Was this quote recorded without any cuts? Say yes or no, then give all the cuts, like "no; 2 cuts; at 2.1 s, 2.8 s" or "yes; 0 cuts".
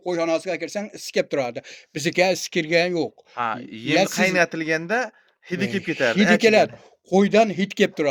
yes; 0 cuts